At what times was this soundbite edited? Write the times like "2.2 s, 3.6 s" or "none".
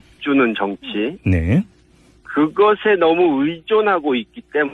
3.0 s